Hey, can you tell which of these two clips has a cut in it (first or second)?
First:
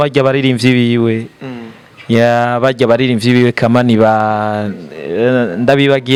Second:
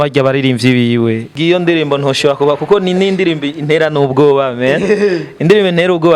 second